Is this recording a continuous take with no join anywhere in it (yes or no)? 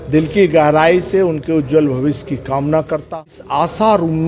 no